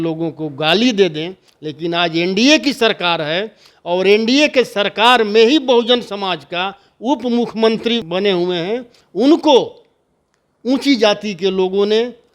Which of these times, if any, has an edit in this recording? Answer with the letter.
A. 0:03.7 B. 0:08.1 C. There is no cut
B